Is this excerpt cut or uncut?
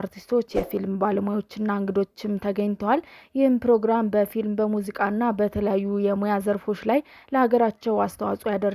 uncut